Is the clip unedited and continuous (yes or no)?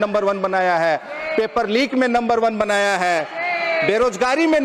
yes